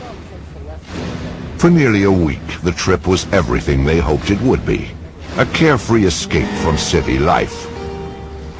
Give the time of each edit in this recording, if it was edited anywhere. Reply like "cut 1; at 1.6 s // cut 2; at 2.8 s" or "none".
none